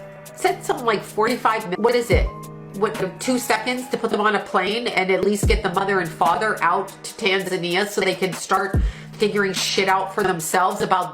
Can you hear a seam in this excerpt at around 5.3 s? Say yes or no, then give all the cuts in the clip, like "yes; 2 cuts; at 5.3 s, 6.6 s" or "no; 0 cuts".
no; 1 cut; at 1.7 s